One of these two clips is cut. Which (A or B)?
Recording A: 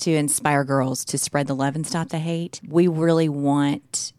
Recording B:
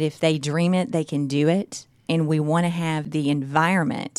B